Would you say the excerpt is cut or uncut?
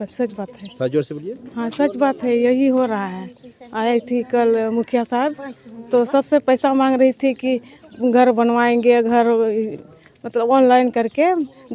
uncut